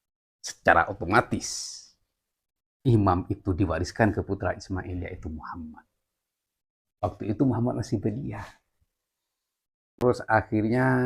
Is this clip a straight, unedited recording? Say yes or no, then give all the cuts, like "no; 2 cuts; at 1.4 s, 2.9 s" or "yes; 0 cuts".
no; 1 cut; at 10.0 s